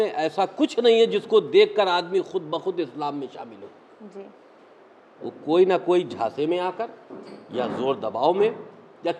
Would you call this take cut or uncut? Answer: uncut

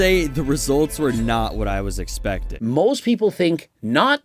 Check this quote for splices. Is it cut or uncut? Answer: cut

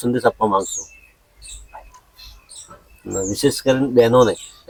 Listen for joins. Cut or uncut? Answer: uncut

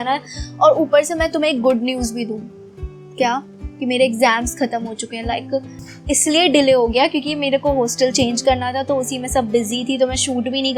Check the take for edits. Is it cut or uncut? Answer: uncut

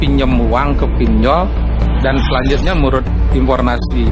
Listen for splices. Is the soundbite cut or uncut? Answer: uncut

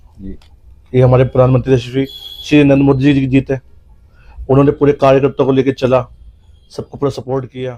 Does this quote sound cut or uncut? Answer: uncut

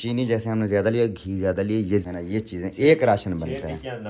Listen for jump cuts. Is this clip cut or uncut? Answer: cut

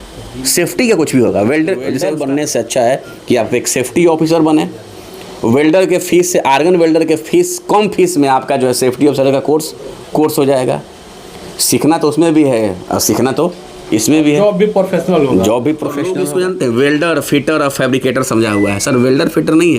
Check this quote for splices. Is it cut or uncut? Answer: cut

